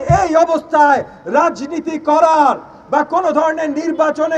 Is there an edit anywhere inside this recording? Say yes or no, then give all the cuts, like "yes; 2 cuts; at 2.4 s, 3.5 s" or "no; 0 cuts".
no; 0 cuts